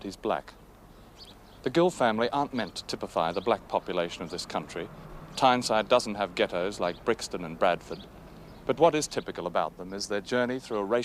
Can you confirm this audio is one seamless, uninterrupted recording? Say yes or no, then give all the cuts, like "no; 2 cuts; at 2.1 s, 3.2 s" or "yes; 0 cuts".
no; 1 cut; at 9.3 s